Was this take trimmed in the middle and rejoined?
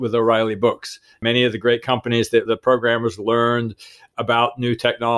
yes; 2 cuts; at 1.2 s, 2.5 s

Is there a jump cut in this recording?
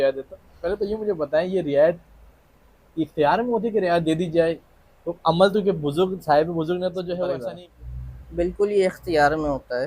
yes; 1 cut; at 7.4 s

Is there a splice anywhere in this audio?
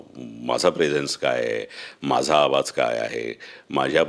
no; 0 cuts

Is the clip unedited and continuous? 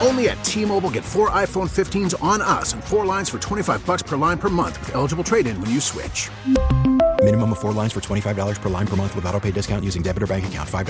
yes; 0 cuts

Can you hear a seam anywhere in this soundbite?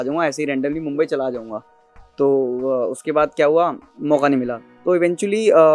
no; 0 cuts

